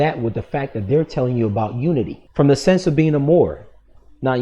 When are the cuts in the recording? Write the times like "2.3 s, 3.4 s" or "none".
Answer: 2.2 s